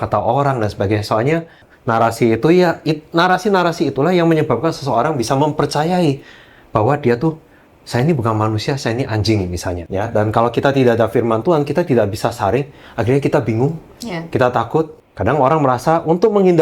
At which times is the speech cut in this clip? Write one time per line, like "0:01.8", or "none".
0:01.7
0:09.8
0:15.0

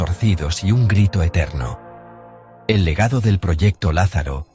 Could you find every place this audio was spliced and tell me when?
none

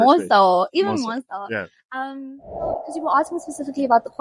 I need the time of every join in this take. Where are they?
0:02.9

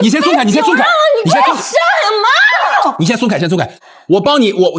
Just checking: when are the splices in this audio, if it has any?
0:03.8

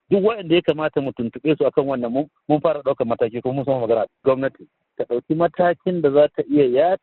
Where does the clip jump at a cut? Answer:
0:04.5

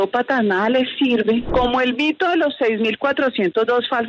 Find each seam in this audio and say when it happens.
0:01.5

